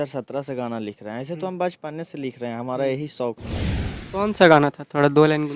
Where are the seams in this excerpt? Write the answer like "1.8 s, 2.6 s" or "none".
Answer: 4.0 s